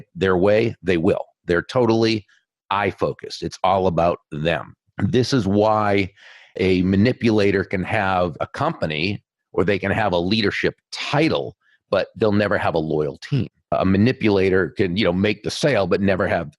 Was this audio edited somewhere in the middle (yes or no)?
yes